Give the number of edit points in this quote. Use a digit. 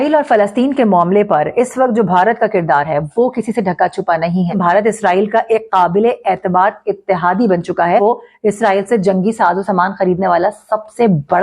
2